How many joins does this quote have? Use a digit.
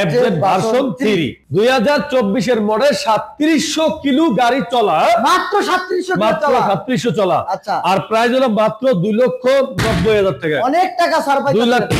1